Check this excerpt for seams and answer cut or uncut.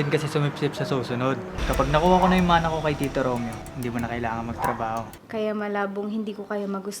cut